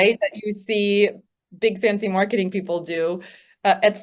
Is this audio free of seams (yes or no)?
yes